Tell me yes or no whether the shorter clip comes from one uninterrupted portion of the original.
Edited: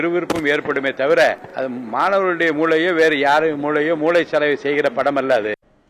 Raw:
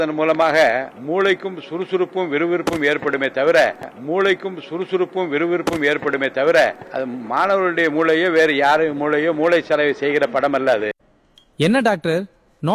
no